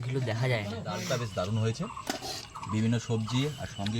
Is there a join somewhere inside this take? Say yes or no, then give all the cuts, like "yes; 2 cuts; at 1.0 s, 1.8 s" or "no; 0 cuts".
yes; 1 cut; at 1.0 s